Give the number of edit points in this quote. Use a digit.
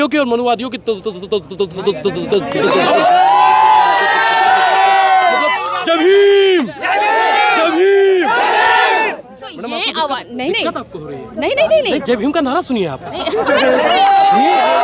0